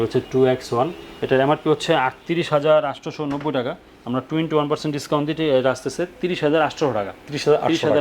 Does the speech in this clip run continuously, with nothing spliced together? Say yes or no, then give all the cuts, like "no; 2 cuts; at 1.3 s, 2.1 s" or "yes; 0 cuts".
yes; 0 cuts